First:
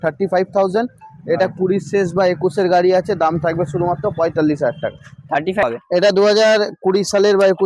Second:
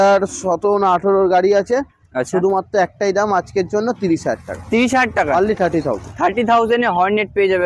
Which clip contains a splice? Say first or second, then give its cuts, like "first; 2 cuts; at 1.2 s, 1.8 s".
first; 1 cut; at 5.6 s